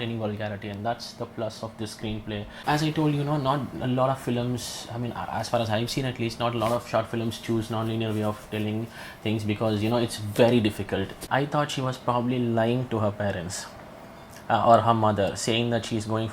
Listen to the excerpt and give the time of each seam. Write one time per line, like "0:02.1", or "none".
0:02.6
0:11.2